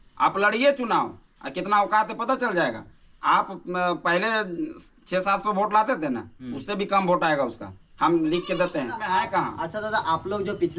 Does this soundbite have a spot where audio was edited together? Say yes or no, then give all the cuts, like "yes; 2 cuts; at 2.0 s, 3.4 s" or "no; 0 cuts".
yes; 1 cut; at 9.1 s